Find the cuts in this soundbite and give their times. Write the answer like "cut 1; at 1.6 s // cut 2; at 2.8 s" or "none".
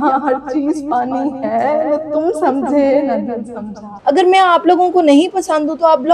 cut 1; at 3.9 s